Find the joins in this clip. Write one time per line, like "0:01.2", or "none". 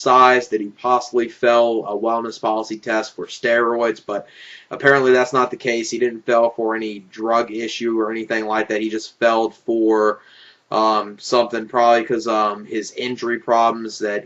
0:12.3